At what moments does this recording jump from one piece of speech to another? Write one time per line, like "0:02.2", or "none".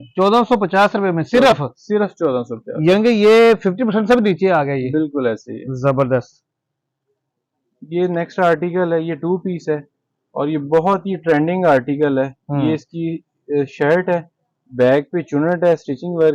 none